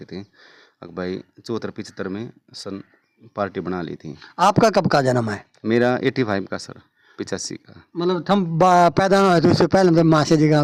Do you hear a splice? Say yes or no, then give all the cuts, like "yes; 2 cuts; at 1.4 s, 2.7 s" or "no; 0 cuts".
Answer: no; 0 cuts